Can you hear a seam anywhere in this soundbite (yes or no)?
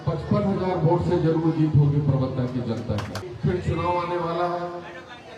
yes